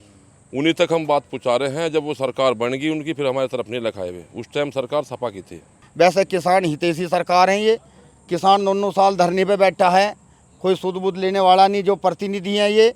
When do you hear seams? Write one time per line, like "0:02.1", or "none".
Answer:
0:05.8